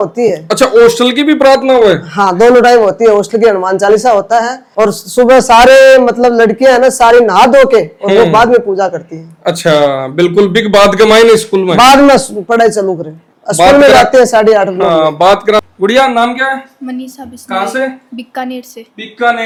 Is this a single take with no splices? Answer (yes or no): yes